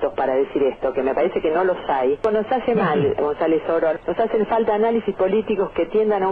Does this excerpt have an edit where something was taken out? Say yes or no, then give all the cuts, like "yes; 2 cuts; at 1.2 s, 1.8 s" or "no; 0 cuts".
no; 0 cuts